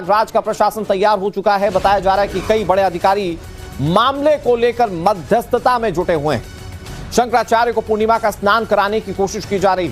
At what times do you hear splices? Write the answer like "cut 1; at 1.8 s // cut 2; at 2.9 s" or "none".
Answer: cut 1; at 2.6 s